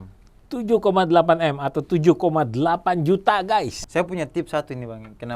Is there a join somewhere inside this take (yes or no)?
yes